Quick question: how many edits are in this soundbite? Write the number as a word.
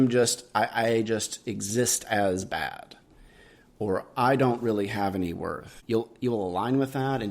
one